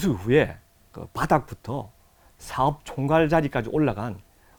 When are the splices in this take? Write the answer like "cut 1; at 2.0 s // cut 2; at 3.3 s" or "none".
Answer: none